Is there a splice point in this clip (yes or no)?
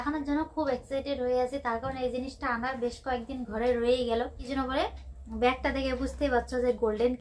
yes